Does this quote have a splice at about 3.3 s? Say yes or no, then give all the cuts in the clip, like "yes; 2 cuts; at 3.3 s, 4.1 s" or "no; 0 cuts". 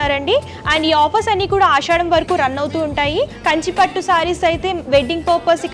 yes; 1 cut; at 3.3 s